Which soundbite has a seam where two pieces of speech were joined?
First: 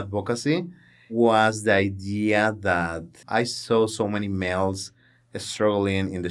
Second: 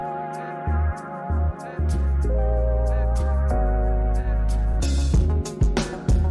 first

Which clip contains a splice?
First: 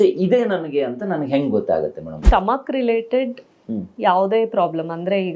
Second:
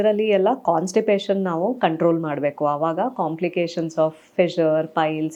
first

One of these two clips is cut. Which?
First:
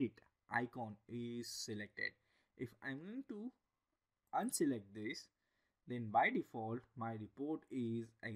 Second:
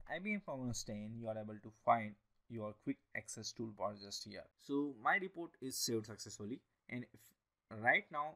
second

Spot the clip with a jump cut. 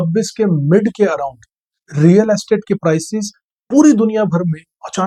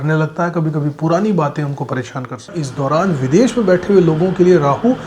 second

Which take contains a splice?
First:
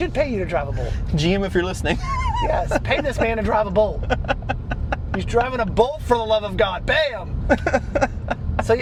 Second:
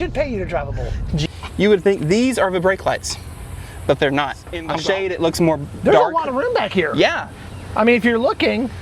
second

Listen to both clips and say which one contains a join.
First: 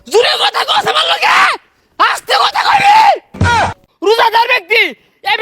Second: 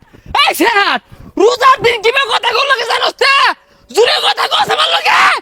first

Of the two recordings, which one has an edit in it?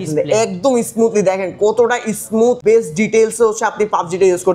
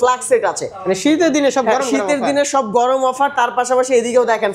first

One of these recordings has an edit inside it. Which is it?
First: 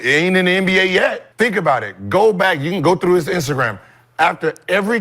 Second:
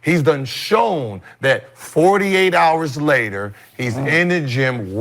first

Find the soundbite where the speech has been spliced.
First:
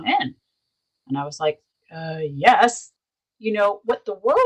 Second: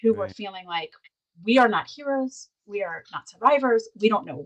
first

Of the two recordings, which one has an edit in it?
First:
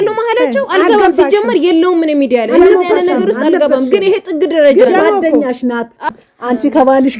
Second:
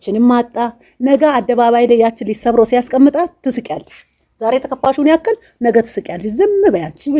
first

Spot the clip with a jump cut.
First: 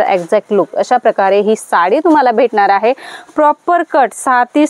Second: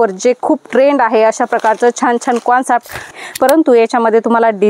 second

